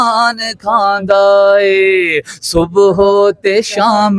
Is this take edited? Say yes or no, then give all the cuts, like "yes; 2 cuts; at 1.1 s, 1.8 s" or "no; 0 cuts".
no; 0 cuts